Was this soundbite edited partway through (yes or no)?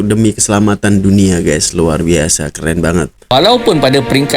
yes